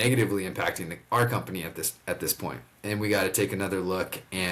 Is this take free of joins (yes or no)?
yes